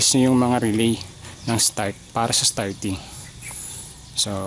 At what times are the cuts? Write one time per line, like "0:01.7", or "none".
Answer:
none